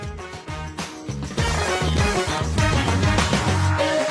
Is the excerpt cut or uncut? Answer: uncut